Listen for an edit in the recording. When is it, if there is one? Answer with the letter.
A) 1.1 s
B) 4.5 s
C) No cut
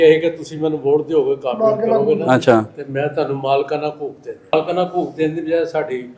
B